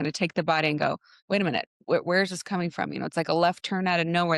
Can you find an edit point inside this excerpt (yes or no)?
no